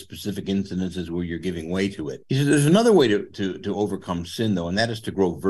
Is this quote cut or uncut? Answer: cut